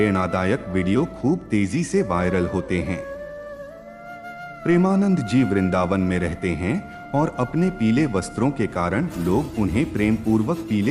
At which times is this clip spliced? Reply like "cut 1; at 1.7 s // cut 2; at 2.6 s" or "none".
none